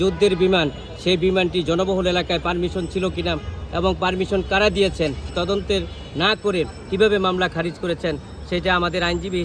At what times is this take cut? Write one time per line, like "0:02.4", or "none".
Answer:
0:05.3